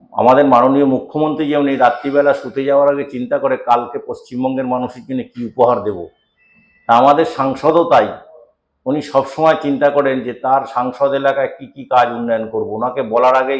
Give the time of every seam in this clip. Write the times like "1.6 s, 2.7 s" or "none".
none